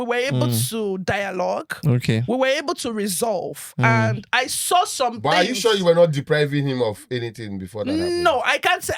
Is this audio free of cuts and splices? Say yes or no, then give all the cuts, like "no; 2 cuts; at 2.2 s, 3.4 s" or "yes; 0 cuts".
yes; 0 cuts